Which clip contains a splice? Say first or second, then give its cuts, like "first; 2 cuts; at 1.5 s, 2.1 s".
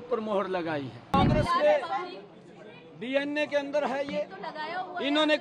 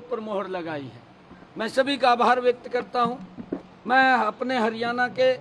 first; 1 cut; at 1.1 s